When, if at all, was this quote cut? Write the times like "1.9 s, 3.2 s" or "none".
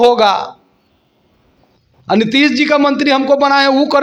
none